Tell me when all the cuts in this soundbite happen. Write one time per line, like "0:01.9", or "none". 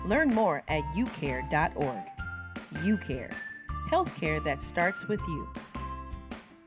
none